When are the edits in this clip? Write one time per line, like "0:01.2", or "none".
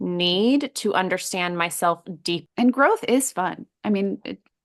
0:02.4